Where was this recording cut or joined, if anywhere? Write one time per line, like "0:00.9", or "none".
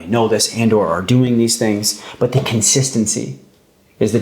none